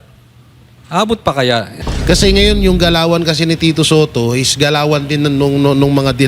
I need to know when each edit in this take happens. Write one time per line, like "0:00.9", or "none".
0:01.8